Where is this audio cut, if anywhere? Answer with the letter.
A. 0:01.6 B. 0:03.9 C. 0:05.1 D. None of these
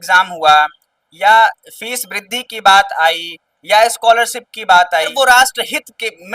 C